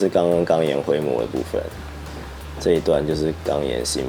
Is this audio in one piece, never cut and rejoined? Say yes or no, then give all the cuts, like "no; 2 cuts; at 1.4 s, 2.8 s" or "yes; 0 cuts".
yes; 0 cuts